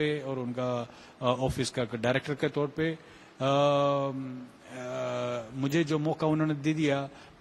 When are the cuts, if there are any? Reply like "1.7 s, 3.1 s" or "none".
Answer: none

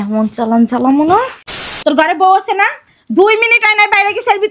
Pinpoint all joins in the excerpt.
1.6 s

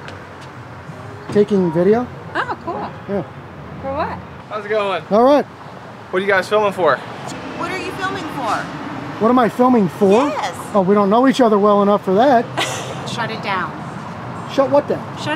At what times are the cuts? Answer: 4.5 s, 7.1 s, 13.1 s

